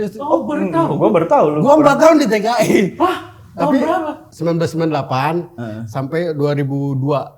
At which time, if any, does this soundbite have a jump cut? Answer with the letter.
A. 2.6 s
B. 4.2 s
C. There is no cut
B